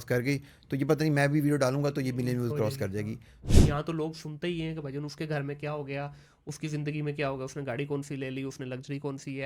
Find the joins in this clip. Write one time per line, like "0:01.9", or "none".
0:03.4

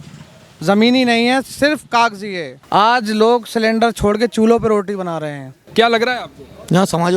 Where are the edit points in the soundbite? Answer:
0:02.5
0:05.6

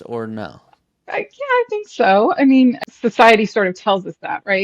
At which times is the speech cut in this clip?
0:02.8

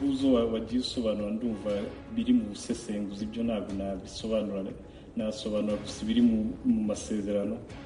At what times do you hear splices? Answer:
none

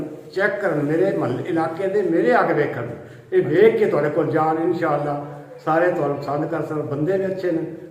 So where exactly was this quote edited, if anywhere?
none

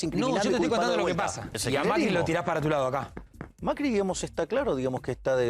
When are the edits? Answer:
0:01.6

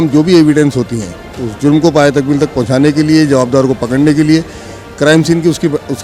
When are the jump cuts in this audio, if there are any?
none

